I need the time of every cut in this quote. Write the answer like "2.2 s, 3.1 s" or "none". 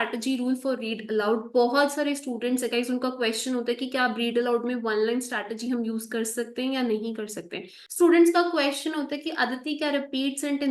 7.8 s